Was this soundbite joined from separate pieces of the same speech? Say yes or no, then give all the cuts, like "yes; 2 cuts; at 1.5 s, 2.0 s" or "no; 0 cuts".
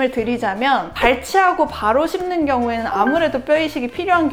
no; 0 cuts